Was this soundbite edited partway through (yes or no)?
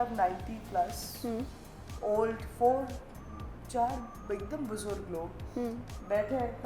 no